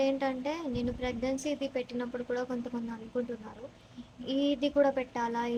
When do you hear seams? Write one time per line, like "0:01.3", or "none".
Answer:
none

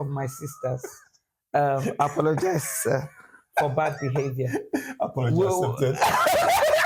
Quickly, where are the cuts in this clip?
none

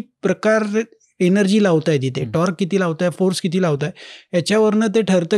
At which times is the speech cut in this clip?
none

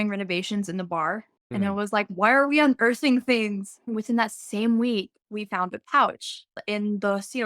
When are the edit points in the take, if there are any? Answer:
0:01.4
0:03.9

